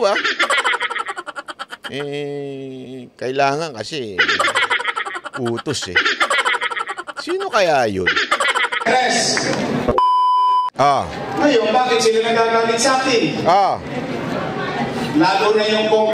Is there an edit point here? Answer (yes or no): yes